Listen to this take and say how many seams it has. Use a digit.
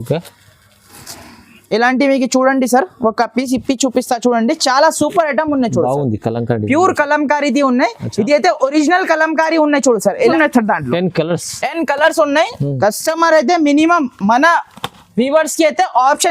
1